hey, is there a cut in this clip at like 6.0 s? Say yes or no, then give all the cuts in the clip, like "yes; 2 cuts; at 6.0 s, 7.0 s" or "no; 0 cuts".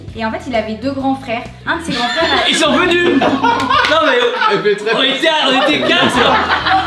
yes; 1 cut; at 6.0 s